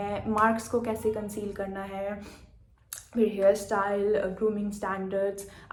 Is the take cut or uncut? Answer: uncut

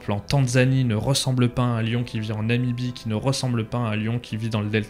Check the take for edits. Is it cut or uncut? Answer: uncut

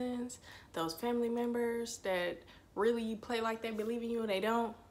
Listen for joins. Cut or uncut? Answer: uncut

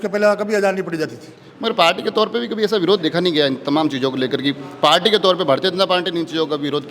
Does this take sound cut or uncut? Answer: uncut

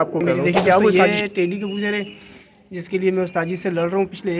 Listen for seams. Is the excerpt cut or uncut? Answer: cut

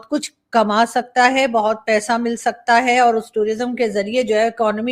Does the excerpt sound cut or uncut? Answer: uncut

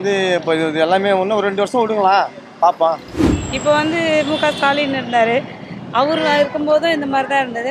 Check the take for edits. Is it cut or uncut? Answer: cut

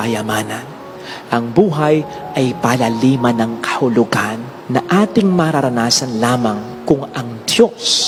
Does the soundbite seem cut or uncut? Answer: uncut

